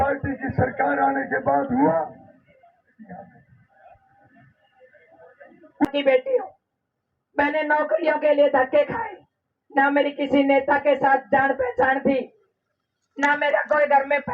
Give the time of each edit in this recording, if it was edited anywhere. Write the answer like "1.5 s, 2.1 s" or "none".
5.9 s